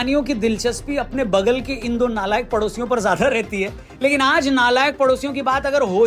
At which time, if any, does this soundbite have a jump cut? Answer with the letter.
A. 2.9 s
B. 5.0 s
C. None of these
C